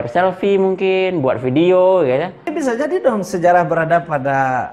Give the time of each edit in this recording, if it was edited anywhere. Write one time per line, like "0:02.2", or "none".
0:02.5

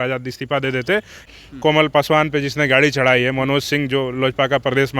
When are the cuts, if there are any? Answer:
0:01.2

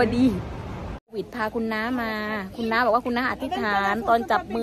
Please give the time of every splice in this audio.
0:01.1

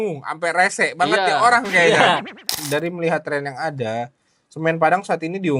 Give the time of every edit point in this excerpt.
0:02.6

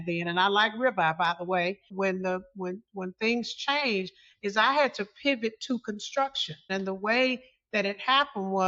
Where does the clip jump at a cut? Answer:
0:01.9
0:06.6

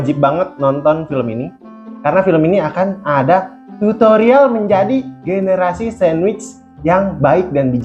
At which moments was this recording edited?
none

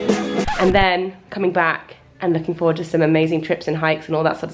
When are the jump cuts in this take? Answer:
none

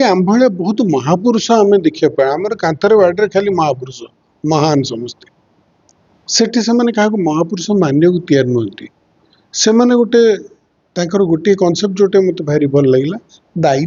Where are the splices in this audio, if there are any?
none

